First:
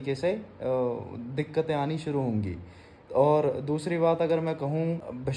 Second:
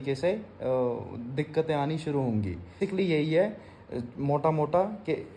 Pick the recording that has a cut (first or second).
second